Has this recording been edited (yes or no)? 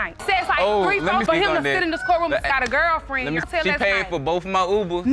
no